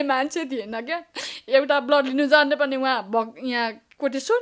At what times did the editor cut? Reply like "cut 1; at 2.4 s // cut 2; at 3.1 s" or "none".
none